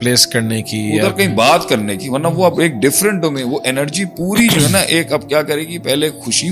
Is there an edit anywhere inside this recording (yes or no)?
no